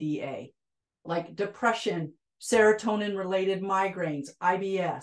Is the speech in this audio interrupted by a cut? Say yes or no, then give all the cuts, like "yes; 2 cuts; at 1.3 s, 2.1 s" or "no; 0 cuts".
yes; 1 cut; at 1.1 s